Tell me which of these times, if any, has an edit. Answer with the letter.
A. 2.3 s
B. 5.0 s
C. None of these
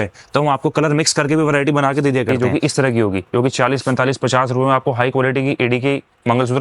A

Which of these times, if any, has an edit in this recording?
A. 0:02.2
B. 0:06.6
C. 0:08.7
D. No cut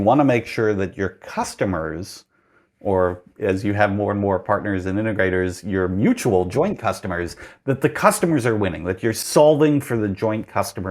D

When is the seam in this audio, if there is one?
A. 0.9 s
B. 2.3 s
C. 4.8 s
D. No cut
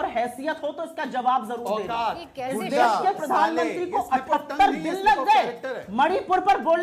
D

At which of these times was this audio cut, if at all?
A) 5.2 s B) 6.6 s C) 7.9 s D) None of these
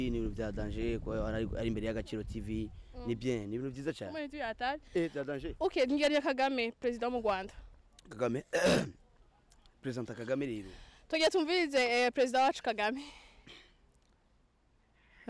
D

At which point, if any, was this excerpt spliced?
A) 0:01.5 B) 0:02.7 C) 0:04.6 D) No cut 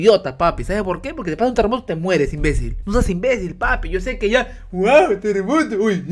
B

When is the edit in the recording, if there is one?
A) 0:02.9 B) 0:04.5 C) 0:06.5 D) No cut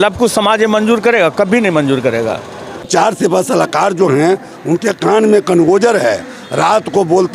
A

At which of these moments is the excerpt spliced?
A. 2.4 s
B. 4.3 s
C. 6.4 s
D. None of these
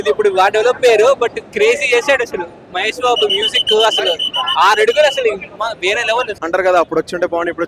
C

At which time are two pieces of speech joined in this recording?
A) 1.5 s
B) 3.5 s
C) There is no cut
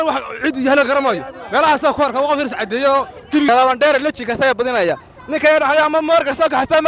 B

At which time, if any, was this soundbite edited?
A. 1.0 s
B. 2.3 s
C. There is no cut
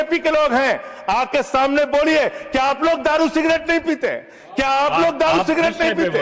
C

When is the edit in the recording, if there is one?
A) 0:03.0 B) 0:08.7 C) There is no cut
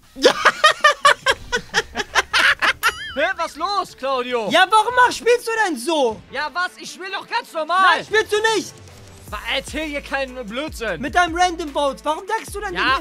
A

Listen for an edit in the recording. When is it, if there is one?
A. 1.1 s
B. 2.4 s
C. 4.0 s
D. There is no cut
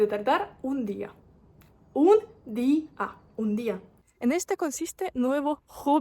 C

